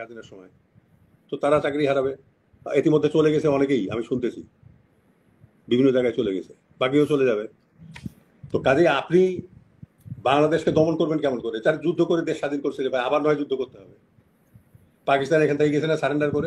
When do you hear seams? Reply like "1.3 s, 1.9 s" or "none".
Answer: none